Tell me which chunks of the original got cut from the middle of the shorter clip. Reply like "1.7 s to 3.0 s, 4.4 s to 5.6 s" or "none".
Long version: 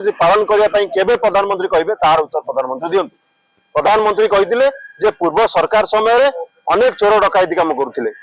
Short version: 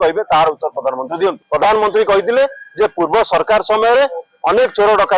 3.1 s to 3.6 s